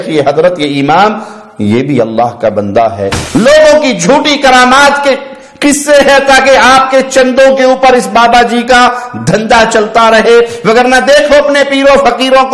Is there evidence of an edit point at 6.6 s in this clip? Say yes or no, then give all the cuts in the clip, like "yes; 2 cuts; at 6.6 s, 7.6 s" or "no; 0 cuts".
no; 1 cut; at 3.1 s